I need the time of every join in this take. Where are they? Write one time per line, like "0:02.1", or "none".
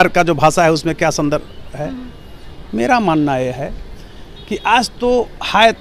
none